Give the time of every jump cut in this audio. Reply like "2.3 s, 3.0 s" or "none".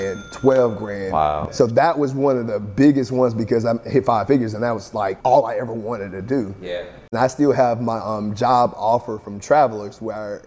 1.4 s, 7.1 s